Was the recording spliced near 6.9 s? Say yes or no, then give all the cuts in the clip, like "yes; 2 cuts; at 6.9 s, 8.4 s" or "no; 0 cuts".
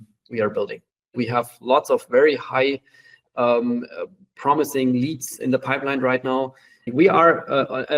yes; 2 cuts; at 1.1 s, 6.9 s